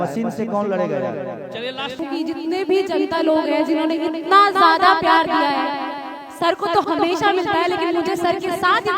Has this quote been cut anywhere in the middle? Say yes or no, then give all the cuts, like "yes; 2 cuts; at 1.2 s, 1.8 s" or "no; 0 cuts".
yes; 1 cut; at 2.0 s